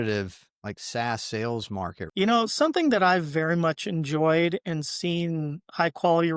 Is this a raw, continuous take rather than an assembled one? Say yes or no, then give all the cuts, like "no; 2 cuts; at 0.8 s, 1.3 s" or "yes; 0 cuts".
no; 1 cut; at 2.0 s